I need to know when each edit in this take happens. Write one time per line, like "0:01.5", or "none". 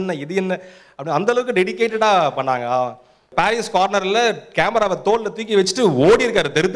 0:03.3